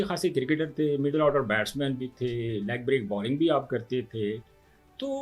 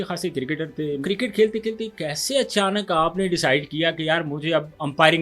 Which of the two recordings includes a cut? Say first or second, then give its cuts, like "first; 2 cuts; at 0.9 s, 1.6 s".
second; 1 cut; at 1.0 s